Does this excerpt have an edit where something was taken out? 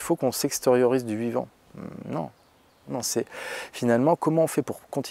yes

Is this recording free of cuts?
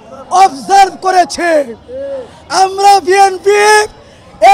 yes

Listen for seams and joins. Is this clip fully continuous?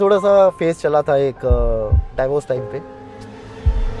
yes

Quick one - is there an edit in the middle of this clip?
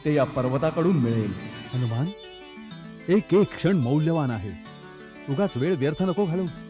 yes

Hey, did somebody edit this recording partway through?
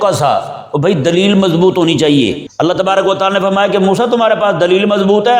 yes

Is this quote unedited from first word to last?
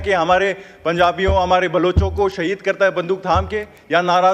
yes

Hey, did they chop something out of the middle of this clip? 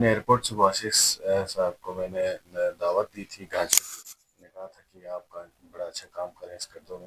no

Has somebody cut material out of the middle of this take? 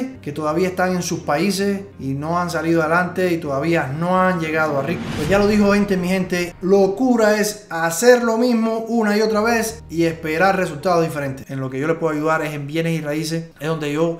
yes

